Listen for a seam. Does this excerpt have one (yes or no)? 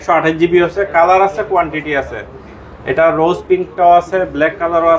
no